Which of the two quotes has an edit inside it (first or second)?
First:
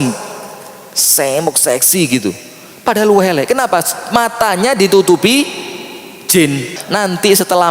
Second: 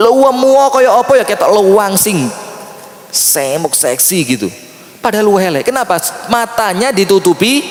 first